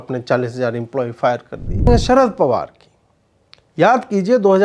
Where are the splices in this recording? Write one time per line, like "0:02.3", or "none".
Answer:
0:01.9